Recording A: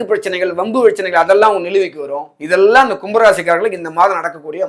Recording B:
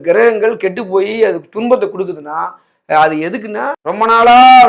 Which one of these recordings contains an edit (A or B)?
B